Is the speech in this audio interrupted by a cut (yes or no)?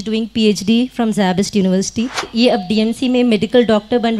yes